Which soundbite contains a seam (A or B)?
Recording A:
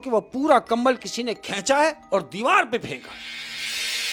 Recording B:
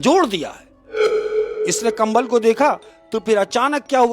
B